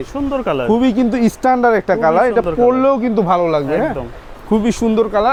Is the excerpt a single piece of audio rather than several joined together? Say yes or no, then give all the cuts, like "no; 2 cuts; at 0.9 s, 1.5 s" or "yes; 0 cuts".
yes; 0 cuts